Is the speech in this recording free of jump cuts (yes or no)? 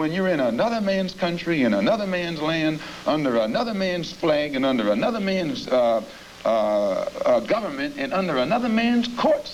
yes